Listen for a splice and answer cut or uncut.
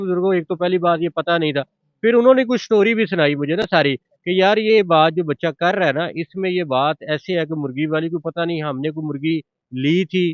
uncut